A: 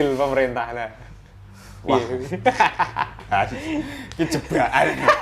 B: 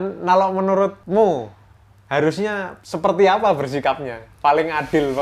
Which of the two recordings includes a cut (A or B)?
B